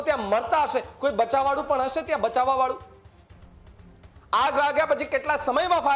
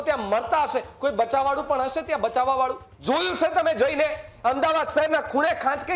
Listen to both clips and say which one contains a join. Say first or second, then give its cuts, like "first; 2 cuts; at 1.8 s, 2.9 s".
second; 1 cut; at 2.9 s